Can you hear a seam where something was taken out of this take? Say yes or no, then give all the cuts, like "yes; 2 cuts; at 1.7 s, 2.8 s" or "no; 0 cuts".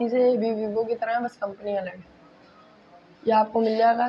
no; 0 cuts